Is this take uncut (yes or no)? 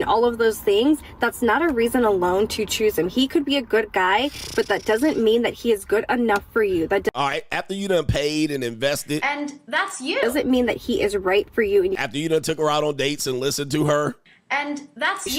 yes